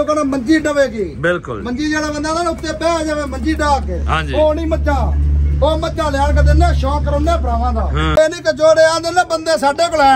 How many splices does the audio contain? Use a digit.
1